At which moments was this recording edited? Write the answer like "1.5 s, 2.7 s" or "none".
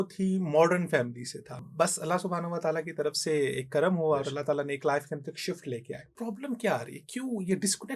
1.6 s, 6.1 s